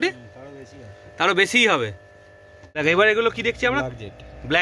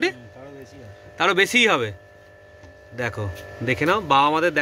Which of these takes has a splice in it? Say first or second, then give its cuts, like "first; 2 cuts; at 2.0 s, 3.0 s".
first; 1 cut; at 2.6 s